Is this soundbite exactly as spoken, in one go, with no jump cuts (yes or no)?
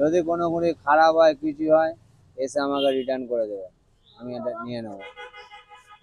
yes